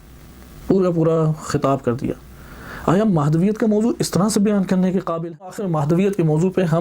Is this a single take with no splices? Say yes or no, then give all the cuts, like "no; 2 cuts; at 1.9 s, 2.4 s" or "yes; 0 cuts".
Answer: no; 1 cut; at 5.4 s